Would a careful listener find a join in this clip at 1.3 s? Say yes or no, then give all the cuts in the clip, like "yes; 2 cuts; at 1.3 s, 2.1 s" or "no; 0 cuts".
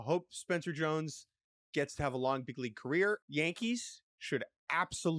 no; 1 cut; at 3.2 s